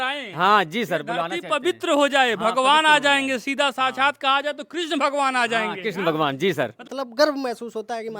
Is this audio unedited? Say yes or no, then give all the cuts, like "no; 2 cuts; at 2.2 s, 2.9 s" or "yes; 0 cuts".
no; 1 cut; at 6.8 s